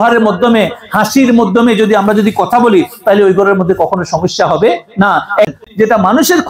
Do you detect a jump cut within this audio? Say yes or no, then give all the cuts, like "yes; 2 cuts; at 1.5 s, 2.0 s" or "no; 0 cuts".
yes; 1 cut; at 5.5 s